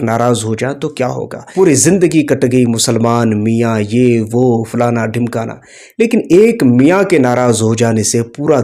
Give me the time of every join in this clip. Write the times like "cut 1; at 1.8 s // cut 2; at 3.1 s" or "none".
cut 1; at 1.3 s

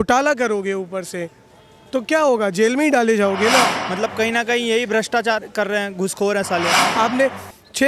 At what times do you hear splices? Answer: cut 1; at 3.7 s // cut 2; at 6.8 s

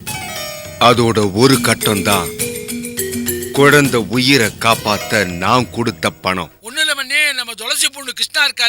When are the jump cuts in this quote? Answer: cut 1; at 6.6 s

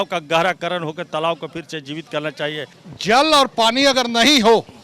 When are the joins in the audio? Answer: cut 1; at 2.7 s

